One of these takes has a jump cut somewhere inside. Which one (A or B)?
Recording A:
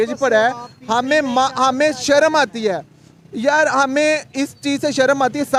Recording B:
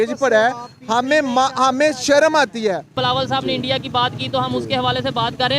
B